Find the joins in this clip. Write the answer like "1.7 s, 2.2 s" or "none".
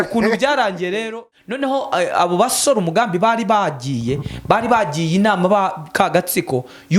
1.1 s